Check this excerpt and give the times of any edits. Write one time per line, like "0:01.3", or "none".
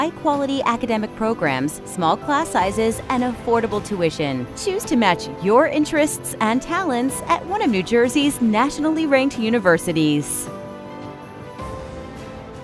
0:10.3

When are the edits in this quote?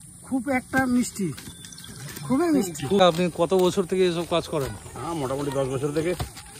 0:01.4
0:03.0

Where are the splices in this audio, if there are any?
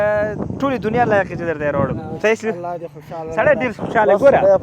0:02.0

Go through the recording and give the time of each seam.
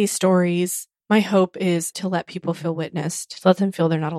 0:01.9

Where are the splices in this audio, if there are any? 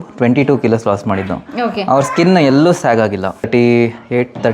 0:03.5

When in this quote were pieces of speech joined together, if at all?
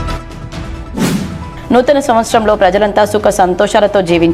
none

